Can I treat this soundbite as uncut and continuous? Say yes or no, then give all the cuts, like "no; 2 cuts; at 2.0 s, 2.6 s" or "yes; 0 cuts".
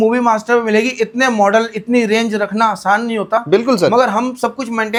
yes; 0 cuts